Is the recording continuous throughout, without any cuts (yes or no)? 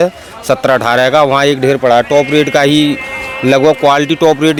yes